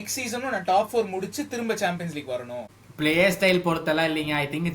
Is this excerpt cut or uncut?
cut